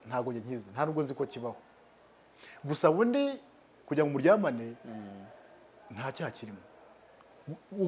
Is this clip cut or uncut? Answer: uncut